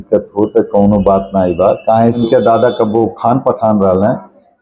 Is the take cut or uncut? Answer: cut